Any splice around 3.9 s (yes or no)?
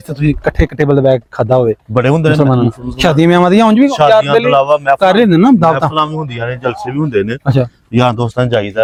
no